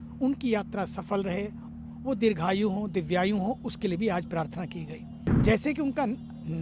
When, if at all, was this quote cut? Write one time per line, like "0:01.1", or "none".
0:05.2